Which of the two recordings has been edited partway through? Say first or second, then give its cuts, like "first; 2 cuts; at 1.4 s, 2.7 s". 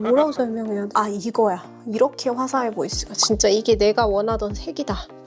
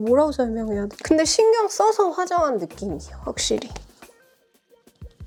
first; 1 cut; at 0.9 s